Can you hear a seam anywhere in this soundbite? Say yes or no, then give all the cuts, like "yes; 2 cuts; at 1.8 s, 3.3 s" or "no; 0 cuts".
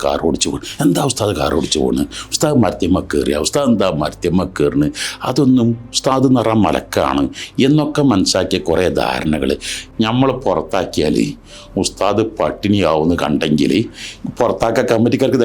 yes; 1 cut; at 9.8 s